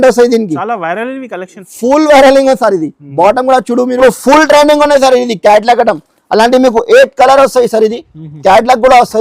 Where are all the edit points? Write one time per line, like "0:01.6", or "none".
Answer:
0:04.0